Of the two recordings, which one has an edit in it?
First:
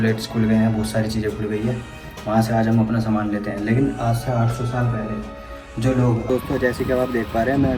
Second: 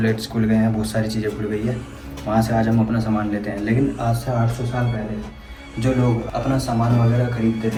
first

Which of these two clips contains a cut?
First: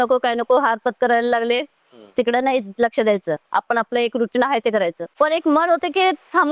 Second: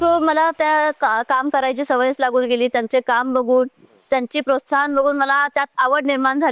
first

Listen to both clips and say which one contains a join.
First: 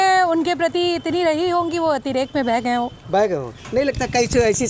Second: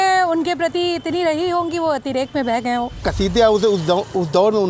second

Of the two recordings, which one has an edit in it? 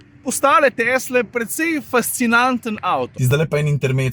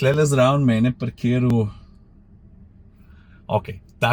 first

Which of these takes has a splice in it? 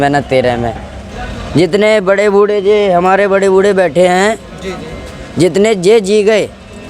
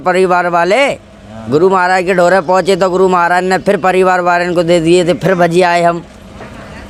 first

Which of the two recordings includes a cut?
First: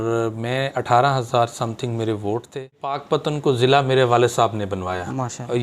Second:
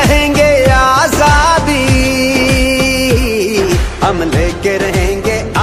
first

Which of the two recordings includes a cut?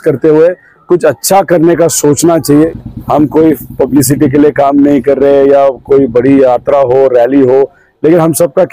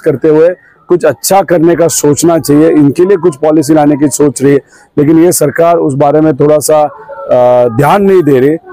first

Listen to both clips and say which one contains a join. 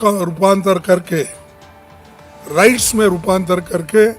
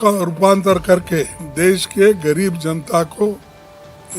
second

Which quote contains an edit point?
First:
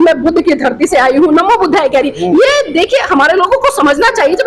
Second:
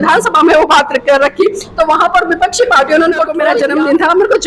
second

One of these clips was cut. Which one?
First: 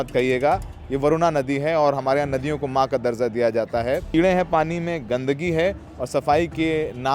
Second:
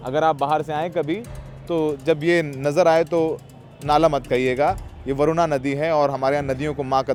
first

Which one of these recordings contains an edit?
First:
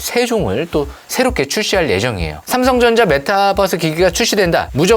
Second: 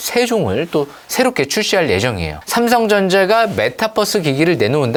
first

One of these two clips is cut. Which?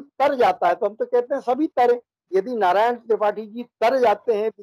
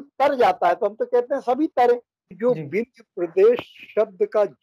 second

